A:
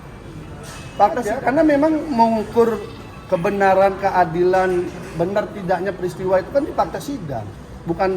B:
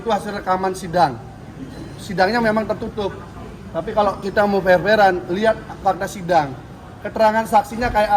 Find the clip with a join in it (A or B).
A